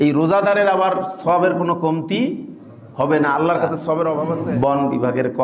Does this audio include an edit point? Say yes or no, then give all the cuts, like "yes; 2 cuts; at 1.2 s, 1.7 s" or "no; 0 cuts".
yes; 1 cut; at 4.3 s